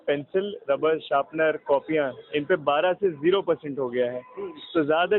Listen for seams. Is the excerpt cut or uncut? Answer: uncut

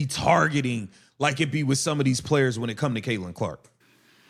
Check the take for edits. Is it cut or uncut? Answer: uncut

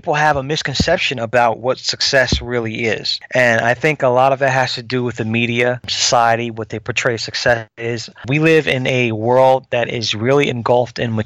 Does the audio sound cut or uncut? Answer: cut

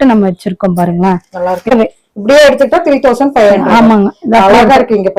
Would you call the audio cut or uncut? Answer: cut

